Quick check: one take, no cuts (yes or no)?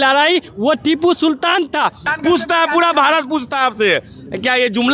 no